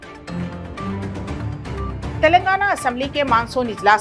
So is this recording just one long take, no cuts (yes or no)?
no